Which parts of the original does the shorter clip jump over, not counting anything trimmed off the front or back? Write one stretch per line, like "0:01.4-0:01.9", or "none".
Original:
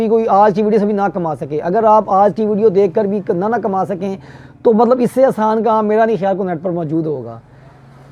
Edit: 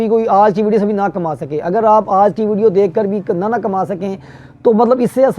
none